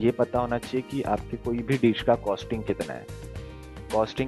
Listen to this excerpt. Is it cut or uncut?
uncut